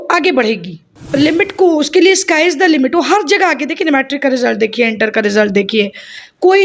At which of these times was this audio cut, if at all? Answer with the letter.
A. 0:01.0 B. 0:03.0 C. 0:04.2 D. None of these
A